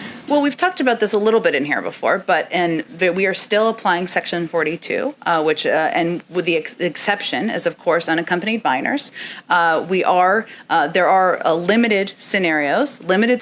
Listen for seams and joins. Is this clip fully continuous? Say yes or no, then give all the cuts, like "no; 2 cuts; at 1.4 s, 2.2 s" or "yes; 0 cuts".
yes; 0 cuts